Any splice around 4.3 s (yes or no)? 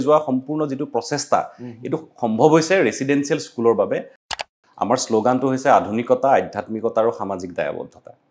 yes